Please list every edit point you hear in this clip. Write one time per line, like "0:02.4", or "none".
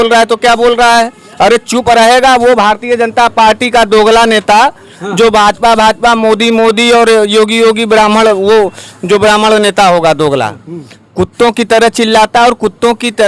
none